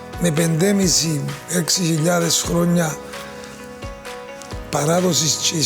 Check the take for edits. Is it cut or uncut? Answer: uncut